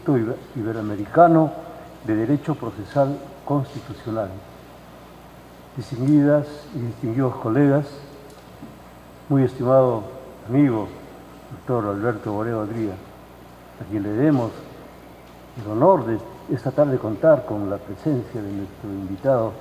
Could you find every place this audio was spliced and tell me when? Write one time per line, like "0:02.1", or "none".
none